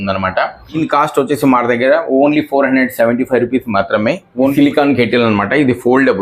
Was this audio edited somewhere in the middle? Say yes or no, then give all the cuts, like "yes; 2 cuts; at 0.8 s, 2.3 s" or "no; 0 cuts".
yes; 2 cuts; at 0.8 s, 4.5 s